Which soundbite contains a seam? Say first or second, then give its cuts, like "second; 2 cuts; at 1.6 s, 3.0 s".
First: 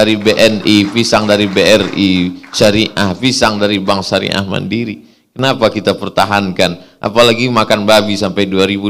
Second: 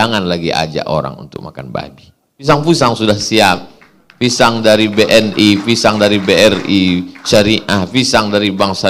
second; 1 cut; at 2.5 s